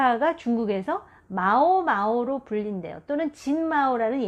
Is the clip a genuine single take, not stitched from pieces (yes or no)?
yes